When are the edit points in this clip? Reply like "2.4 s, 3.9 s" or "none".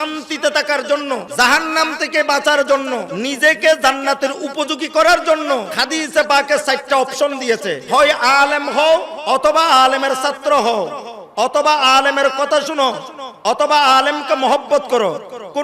1.3 s, 3.1 s, 5.7 s, 7.8 s, 9.1 s